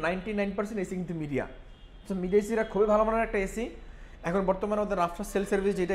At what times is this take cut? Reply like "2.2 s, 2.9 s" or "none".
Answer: none